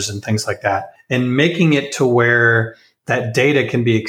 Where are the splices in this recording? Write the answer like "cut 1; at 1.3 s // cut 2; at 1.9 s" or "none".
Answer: cut 1; at 0.9 s